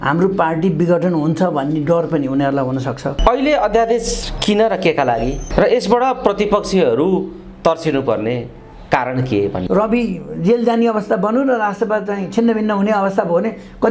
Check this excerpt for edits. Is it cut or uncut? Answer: cut